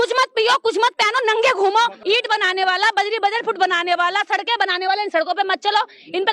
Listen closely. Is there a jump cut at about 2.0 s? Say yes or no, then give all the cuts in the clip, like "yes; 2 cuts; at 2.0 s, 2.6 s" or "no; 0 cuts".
yes; 1 cut; at 2.0 s